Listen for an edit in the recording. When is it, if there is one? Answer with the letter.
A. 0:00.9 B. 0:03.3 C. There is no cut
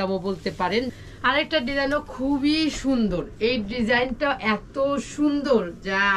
A